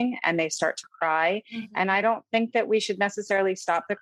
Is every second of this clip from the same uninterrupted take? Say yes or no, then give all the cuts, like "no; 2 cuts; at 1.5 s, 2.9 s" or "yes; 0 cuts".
yes; 0 cuts